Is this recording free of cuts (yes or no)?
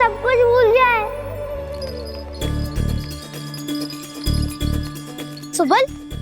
no